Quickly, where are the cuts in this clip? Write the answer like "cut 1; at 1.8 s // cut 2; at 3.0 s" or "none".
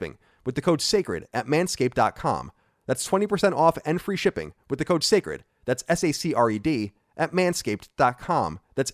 none